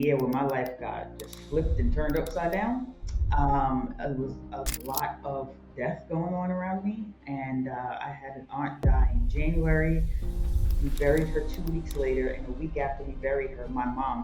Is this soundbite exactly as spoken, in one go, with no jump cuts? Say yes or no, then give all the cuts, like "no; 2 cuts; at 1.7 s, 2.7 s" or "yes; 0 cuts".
yes; 0 cuts